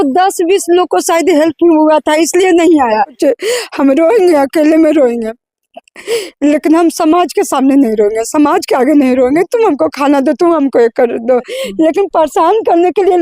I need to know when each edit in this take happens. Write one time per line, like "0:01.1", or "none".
0:03.2
0:11.6